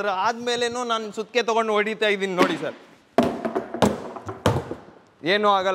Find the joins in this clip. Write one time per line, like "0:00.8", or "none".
none